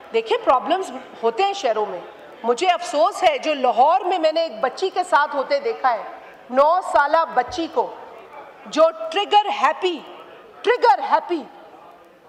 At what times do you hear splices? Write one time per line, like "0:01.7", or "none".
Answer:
none